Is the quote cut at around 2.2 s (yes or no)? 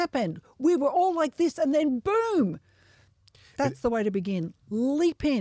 no